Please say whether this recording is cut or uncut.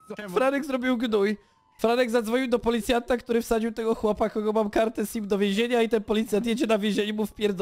uncut